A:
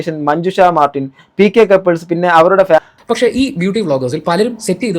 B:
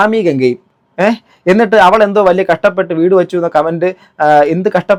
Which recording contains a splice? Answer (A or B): A